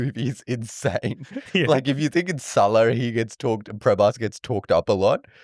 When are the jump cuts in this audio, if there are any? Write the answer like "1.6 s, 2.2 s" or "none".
none